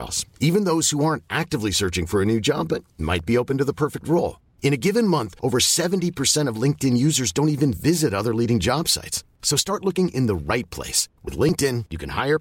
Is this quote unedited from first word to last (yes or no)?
yes